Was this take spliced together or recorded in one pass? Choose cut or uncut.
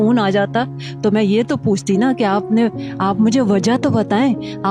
uncut